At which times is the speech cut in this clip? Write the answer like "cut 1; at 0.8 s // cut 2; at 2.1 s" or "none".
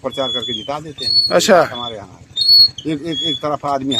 none